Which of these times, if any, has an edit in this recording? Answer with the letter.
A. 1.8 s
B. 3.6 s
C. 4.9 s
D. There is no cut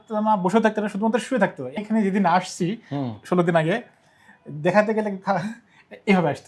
A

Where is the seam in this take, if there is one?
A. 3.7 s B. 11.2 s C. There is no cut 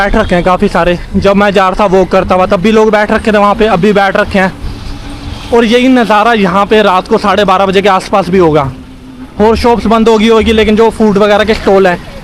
C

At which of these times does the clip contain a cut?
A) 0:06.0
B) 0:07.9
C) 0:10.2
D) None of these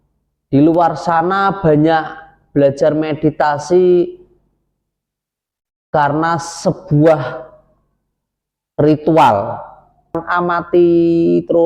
C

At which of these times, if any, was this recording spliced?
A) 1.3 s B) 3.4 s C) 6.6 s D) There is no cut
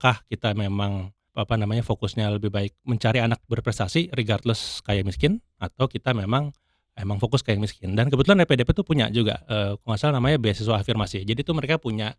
A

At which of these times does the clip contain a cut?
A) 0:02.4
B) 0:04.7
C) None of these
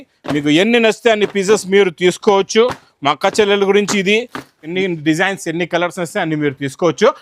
B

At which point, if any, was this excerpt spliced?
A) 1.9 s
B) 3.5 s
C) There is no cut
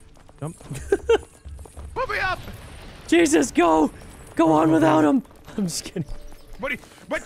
A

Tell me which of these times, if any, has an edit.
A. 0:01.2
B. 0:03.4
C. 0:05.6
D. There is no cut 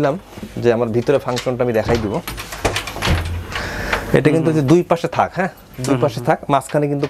D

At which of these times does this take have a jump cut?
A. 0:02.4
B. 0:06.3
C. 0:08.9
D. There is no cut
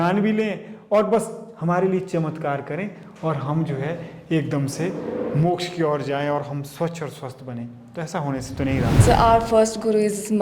C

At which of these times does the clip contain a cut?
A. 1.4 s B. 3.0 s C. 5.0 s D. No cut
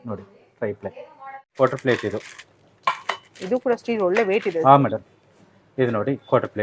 A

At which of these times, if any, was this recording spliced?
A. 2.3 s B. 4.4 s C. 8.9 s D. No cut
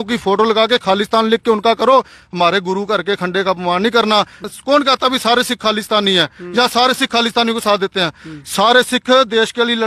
B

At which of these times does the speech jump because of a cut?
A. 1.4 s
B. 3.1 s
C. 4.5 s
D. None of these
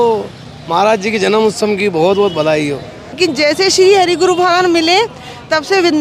B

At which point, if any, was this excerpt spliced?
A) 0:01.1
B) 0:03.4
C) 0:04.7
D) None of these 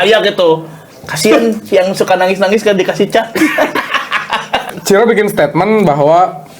C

